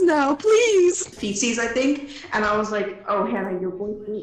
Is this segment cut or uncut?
cut